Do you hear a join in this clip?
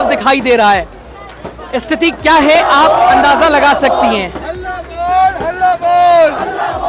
no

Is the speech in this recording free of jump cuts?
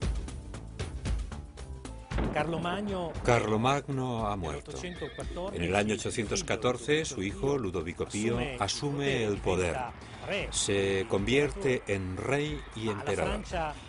yes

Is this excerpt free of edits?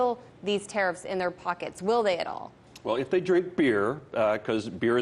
no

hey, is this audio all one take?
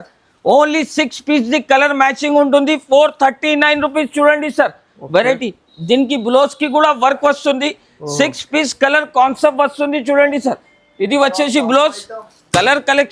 yes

